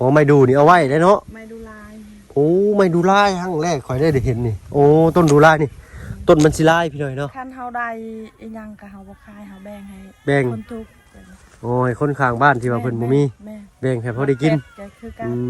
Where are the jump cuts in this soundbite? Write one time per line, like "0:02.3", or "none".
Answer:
0:07.1